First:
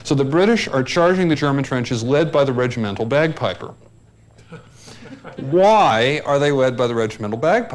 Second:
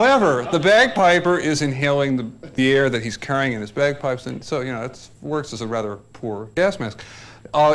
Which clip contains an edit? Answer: first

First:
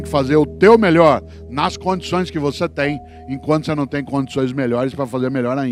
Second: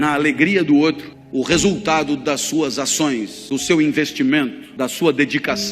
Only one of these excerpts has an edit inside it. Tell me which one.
second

